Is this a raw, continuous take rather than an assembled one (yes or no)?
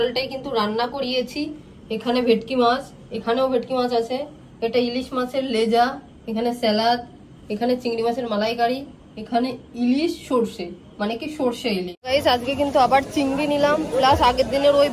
no